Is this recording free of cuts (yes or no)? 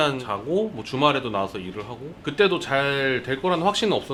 yes